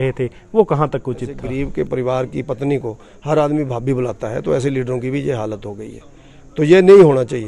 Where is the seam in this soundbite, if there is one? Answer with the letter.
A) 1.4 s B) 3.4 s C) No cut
A